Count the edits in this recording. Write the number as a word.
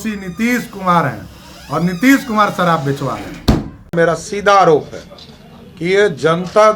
one